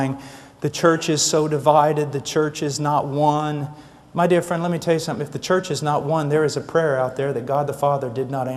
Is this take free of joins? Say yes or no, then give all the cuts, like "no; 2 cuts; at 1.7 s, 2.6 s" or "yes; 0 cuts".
no; 1 cut; at 5.1 s